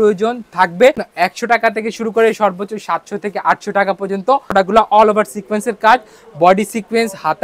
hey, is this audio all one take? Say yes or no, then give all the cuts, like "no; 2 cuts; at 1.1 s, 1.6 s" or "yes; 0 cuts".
no; 2 cuts; at 1.1 s, 4.5 s